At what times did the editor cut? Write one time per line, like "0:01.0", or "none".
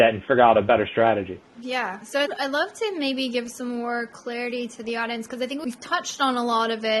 none